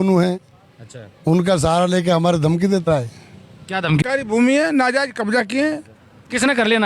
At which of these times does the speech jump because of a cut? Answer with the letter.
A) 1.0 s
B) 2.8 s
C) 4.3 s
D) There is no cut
C